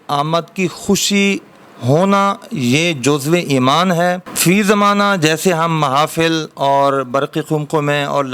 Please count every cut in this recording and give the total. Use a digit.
0